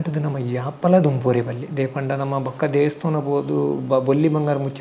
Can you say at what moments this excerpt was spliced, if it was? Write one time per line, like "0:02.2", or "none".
none